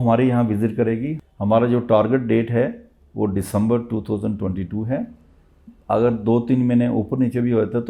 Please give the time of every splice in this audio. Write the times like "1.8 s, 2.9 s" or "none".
1.2 s